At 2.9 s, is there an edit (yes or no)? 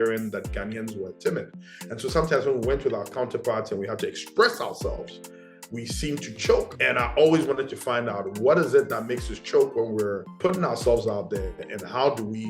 no